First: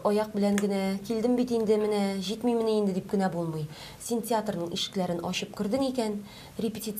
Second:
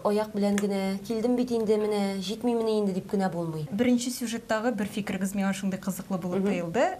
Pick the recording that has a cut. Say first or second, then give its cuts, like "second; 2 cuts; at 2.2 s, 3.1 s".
second; 1 cut; at 3.7 s